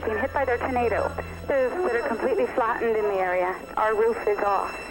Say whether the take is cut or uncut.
cut